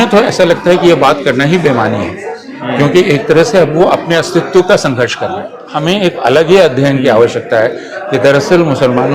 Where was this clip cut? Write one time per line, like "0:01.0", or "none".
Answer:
0:05.6